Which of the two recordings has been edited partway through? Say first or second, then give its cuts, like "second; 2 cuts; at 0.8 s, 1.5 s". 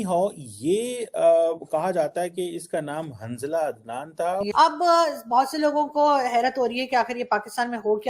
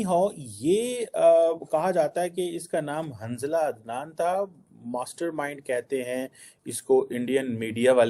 first; 1 cut; at 4.5 s